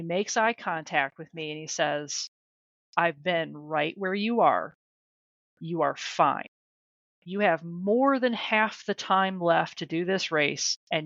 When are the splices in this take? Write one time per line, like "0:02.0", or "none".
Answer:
none